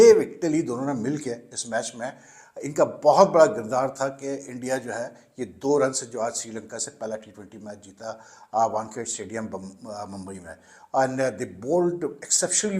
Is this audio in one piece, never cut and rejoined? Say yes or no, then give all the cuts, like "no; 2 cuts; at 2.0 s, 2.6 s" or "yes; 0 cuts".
yes; 0 cuts